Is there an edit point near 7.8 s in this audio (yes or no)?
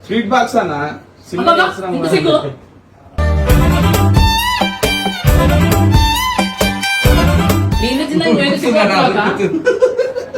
no